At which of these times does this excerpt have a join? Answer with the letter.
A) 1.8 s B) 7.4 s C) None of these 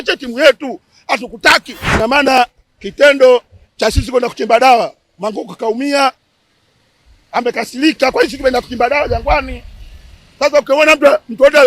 A